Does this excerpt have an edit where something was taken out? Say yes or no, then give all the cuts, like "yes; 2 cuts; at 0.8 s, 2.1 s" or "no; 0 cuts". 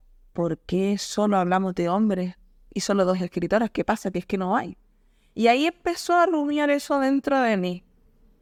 no; 0 cuts